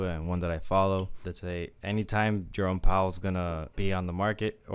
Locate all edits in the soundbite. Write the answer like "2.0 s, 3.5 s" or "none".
1.2 s, 2.5 s, 3.7 s